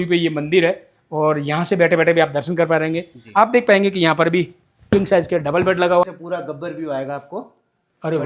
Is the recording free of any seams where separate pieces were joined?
no; 1 cut; at 6.0 s

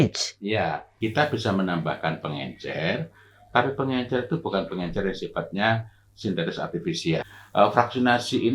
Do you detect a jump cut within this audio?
yes; 2 cuts; at 0.9 s, 7.3 s

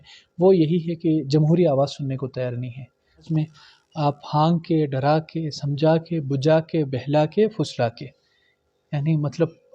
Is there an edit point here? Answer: yes; 1 cut; at 3.3 s

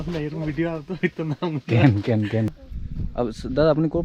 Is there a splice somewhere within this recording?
yes; 1 cut; at 2.5 s

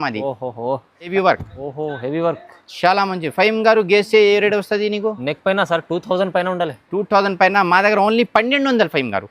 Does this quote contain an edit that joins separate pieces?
yes; 1 cut; at 1.1 s

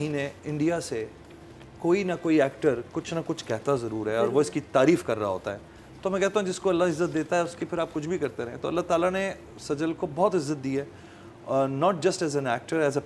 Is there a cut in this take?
no; 0 cuts

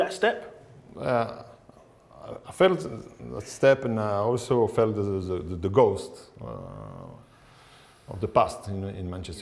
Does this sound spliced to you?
no; 0 cuts

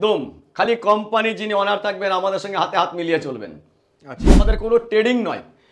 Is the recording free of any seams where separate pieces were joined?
no; 1 cut; at 4.3 s

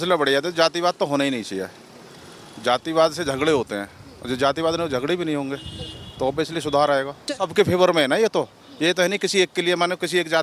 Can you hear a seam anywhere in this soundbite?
yes; 1 cut; at 7.4 s

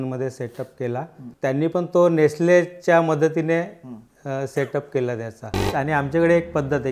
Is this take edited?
yes; 2 cuts; at 1.3 s, 5.7 s

